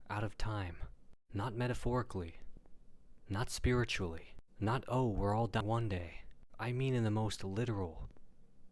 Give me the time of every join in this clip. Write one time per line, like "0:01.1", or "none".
0:05.6